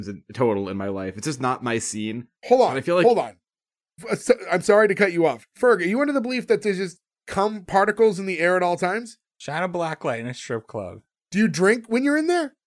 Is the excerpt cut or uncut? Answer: uncut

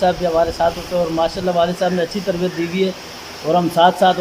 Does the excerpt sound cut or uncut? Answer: uncut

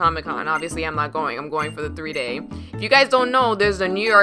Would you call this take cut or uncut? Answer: uncut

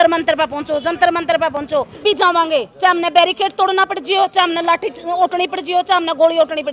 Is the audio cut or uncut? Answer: cut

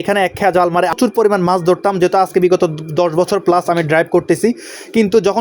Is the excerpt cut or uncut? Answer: cut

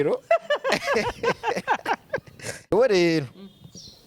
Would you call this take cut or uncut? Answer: cut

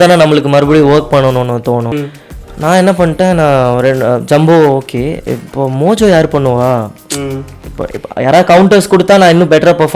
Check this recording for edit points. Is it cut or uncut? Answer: cut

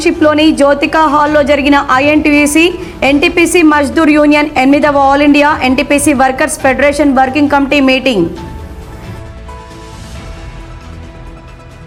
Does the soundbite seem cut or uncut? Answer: uncut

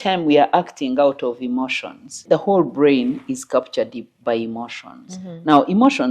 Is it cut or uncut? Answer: cut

